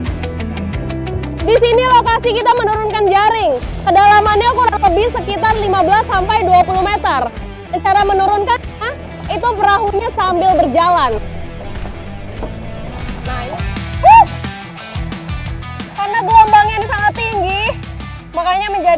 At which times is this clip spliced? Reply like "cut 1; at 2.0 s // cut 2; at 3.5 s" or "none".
cut 1; at 13.1 s